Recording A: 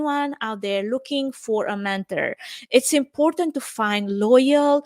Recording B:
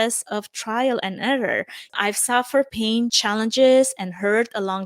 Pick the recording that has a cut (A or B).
B